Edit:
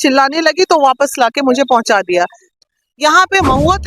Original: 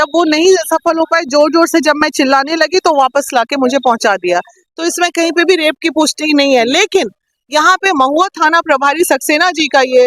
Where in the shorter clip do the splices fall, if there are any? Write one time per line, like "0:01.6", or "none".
0:02.6